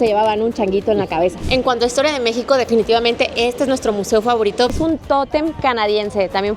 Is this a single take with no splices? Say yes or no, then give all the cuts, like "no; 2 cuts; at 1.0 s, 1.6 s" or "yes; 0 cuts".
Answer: no; 2 cuts; at 1.4 s, 4.7 s